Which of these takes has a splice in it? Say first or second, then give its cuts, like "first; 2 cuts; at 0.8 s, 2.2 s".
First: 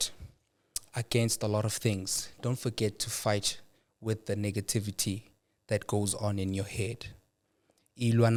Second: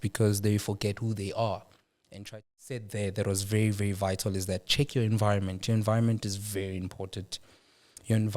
second; 1 cut; at 2.3 s